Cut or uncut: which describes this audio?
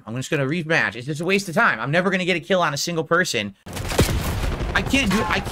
cut